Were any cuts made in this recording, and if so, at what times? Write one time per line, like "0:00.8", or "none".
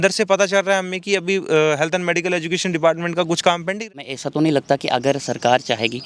0:04.1